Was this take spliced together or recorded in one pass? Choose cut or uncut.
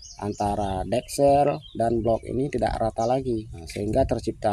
cut